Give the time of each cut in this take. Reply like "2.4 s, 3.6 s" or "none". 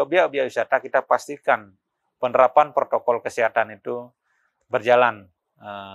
none